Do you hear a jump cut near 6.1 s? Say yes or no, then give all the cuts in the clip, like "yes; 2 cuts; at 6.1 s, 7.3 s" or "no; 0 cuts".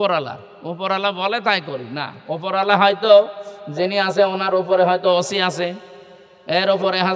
no; 0 cuts